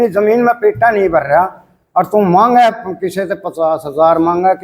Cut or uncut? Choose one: uncut